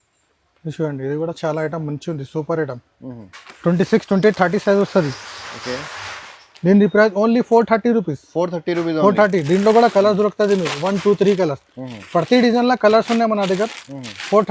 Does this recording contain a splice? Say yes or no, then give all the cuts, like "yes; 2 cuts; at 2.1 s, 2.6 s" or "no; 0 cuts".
no; 0 cuts